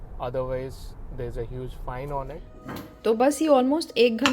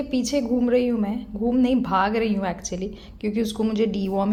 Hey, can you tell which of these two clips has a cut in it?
first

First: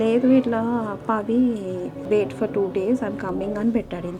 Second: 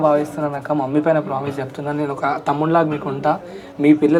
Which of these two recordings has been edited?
first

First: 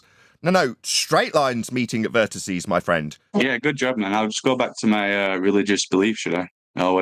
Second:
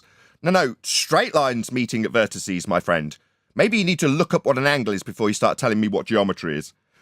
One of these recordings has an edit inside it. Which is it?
first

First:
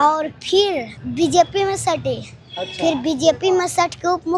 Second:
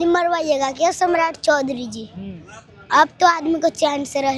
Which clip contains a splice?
first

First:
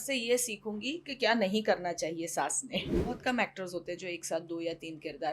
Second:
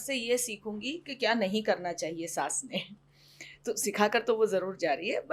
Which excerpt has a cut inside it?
first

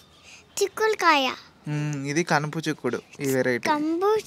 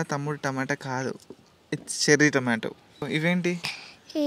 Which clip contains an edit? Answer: second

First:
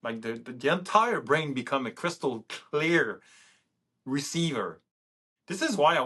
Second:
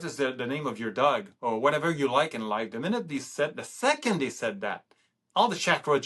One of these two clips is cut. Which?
first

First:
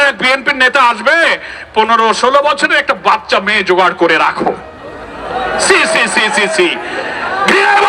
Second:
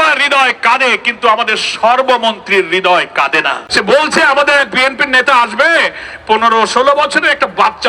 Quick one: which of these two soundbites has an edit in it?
second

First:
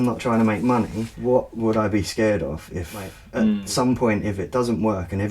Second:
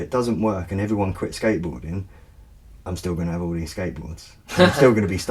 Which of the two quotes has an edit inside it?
first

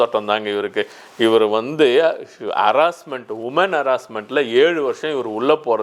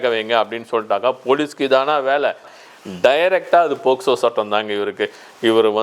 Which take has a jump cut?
second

